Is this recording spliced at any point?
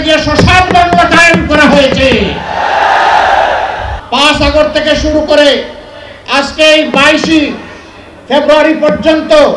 yes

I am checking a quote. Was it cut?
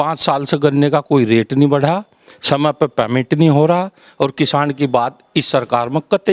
no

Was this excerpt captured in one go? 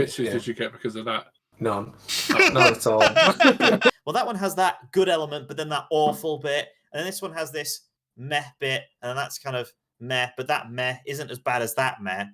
no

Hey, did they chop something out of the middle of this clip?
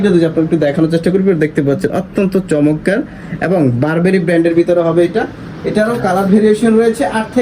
no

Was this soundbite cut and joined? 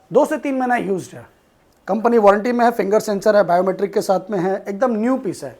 no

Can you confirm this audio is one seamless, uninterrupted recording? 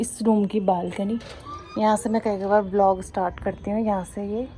yes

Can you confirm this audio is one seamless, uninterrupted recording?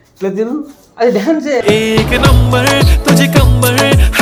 yes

